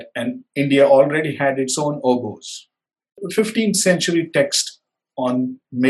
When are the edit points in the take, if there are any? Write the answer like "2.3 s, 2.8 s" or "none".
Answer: 3.2 s